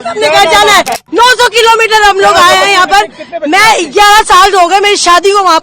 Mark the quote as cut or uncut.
cut